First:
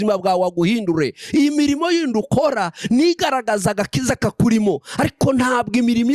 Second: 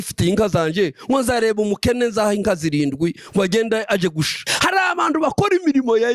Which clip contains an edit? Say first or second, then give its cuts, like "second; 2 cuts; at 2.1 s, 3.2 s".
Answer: second; 1 cut; at 4.4 s